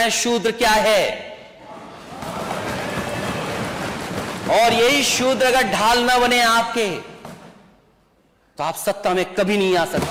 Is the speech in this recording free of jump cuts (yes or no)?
yes